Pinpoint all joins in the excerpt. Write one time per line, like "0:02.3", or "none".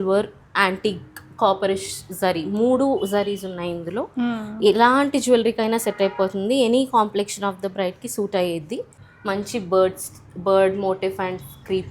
0:09.0